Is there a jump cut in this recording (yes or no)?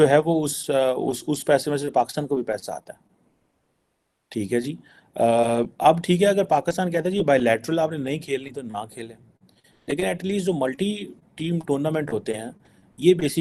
no